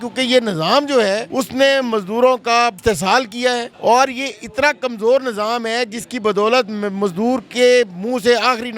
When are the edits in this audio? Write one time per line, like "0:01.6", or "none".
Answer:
0:01.3
0:02.8
0:03.7